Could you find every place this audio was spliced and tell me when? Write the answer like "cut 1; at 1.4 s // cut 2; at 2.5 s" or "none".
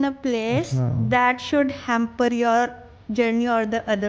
none